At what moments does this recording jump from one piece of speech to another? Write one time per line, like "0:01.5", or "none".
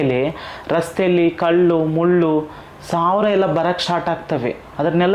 none